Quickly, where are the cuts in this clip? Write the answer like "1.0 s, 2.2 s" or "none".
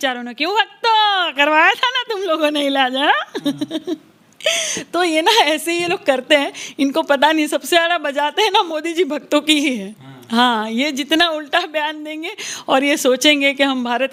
none